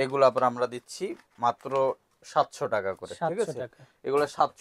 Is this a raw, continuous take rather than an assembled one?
yes; 0 cuts

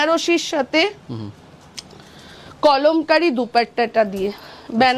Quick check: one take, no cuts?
yes; 0 cuts

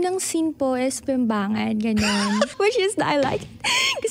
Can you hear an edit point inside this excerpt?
yes; 1 cut; at 2.5 s

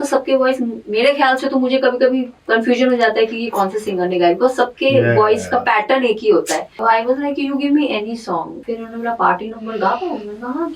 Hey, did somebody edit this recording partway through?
yes; 3 cuts; at 2.3 s, 6.8 s, 8.6 s

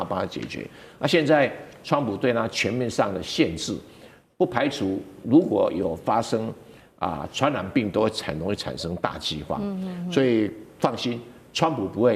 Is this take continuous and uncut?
yes; 0 cuts

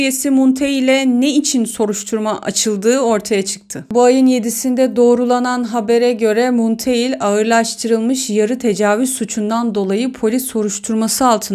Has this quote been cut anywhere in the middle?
no; 0 cuts

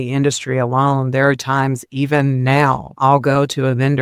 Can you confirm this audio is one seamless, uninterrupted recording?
no; 1 cut; at 2.9 s

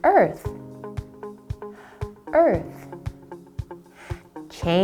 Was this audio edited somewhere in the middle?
no; 0 cuts

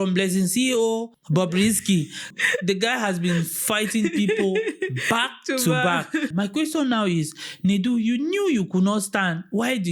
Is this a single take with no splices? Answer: no; 3 cuts; at 1.2 s, 2.3 s, 6.3 s

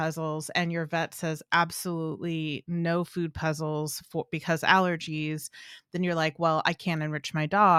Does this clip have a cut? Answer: no; 0 cuts

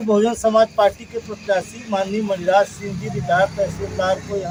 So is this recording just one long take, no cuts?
yes; 0 cuts

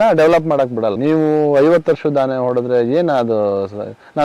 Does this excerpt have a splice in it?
yes; 1 cut; at 0.9 s

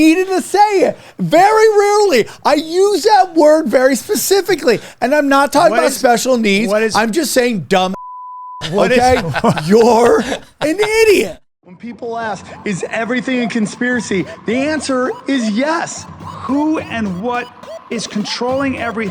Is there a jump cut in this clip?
yes; 1 cut; at 11.4 s

